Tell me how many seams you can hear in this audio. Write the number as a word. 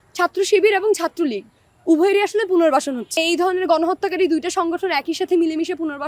one